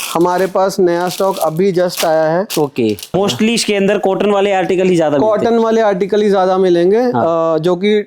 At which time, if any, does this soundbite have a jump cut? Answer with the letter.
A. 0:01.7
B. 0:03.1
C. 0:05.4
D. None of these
B